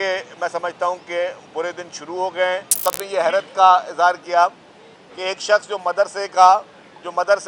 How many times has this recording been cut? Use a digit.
1